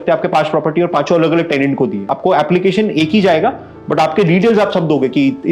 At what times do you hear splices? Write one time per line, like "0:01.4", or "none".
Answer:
0:02.0